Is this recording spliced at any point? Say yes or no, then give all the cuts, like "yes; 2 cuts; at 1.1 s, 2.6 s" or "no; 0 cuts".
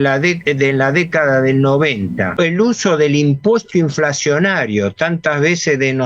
yes; 1 cut; at 2.3 s